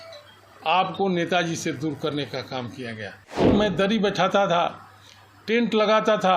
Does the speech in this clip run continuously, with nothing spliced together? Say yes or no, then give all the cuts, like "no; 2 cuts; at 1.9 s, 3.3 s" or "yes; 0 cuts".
no; 1 cut; at 3.5 s